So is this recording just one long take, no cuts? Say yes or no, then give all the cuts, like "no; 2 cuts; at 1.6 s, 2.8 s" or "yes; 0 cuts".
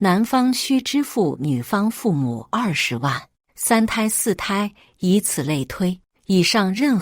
no; 1 cut; at 6.1 s